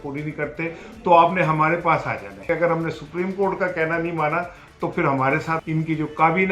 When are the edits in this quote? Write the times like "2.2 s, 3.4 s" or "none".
2.5 s, 5.6 s